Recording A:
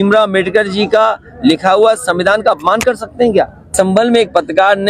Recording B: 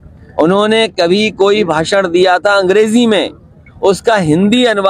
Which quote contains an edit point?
A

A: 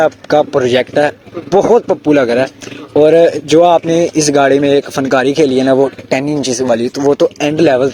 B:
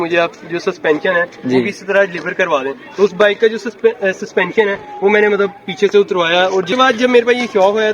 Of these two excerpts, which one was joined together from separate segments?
B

